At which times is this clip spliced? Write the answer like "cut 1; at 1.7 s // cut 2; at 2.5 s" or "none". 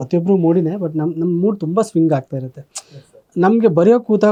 none